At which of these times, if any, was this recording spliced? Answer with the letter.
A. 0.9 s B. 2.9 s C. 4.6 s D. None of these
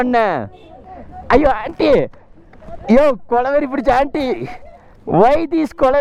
D